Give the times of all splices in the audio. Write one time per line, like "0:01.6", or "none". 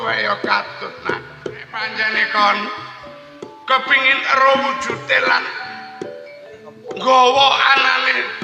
0:02.0